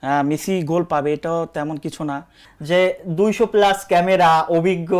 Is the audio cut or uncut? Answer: cut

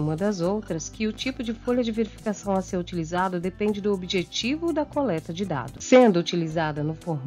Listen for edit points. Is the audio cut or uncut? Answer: uncut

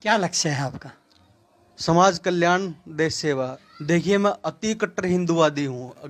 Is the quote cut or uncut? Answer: cut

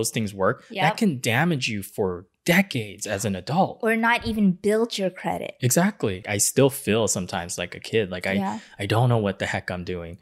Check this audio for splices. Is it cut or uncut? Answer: cut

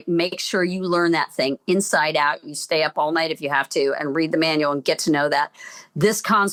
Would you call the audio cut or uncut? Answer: uncut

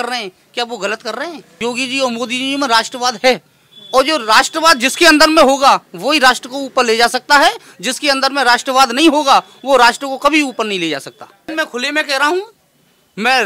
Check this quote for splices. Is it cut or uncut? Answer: cut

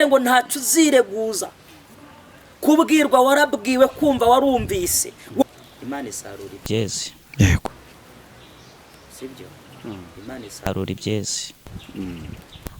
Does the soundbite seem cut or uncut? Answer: cut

